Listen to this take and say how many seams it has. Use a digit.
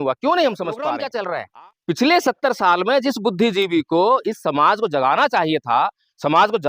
1